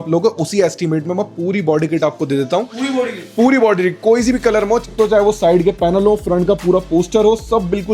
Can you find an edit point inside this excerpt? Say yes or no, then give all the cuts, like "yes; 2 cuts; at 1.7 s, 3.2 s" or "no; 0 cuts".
yes; 1 cut; at 4.8 s